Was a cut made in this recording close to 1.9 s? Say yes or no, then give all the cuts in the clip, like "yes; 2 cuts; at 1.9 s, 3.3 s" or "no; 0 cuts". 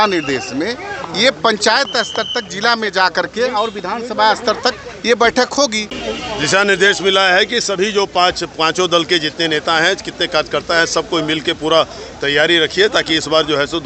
no; 1 cut; at 5.9 s